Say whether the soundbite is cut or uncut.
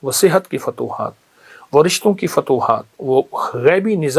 uncut